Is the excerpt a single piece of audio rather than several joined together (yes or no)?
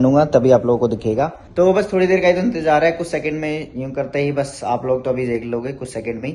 yes